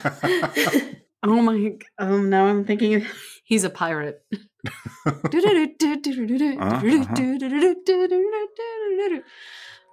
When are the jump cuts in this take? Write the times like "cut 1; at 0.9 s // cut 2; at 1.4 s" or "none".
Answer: cut 1; at 1.2 s